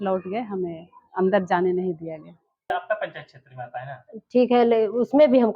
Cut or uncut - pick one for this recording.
cut